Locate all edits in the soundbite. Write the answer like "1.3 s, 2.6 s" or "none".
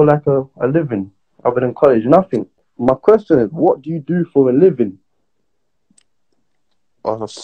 2.6 s

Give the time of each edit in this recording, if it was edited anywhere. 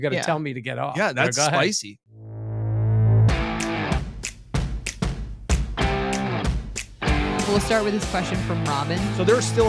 2.0 s

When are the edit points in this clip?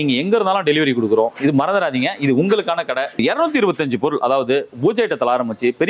3.2 s

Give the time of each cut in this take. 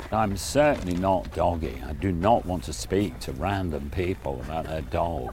none

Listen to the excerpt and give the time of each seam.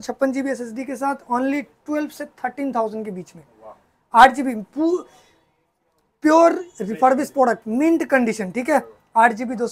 none

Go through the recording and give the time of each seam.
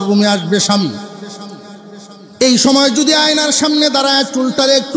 none

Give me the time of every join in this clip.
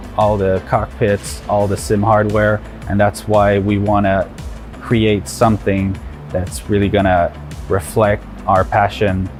none

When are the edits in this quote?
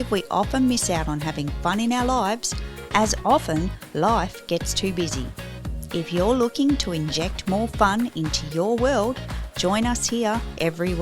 10.0 s

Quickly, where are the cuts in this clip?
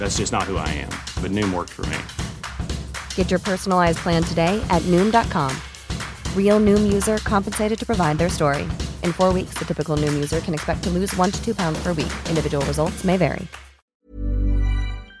14.0 s

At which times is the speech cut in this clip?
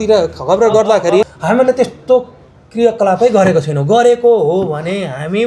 1.3 s

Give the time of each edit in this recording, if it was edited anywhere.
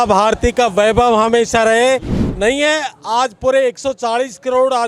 2.2 s

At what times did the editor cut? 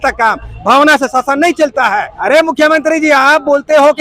2.1 s

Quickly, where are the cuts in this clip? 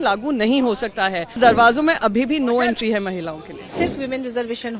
1.4 s, 3.7 s

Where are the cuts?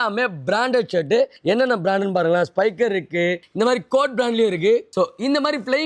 1.4 s, 3.5 s, 4.9 s

